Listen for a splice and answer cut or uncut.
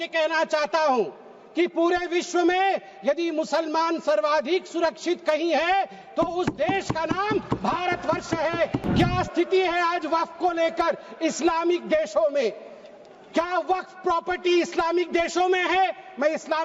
cut